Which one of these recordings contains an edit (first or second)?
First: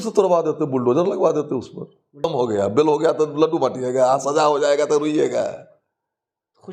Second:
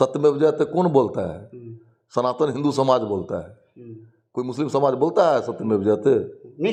first